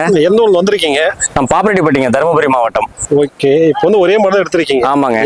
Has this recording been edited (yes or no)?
no